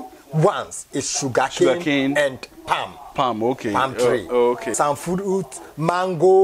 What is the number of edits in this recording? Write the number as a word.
one